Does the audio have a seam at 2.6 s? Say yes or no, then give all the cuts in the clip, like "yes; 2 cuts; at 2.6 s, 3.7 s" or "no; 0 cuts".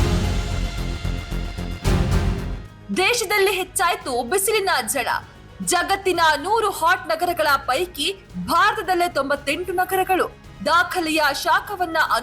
yes; 1 cut; at 2.6 s